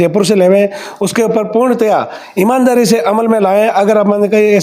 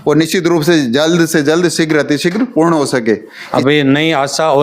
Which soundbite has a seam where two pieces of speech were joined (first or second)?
second